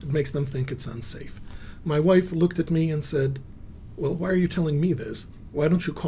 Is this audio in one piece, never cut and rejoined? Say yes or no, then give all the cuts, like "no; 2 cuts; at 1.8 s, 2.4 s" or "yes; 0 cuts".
yes; 0 cuts